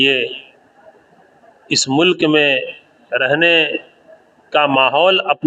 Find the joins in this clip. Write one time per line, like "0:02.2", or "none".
none